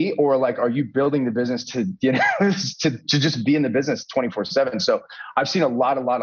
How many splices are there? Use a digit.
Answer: 0